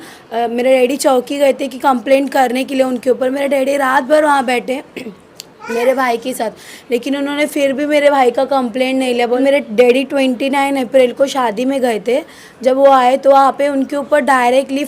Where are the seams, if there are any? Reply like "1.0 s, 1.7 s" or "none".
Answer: 9.4 s